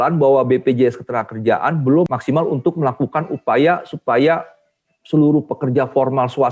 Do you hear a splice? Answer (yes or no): yes